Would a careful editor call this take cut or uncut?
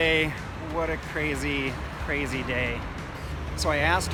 uncut